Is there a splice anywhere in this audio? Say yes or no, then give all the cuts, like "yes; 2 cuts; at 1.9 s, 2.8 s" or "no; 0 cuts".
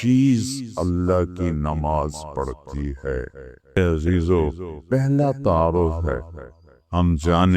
yes; 1 cut; at 3.8 s